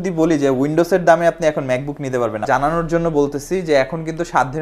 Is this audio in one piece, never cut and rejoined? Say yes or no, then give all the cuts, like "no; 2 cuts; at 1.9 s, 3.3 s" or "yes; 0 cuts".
no; 1 cut; at 2.4 s